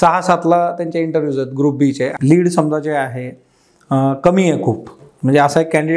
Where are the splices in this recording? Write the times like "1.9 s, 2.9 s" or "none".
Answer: 2.1 s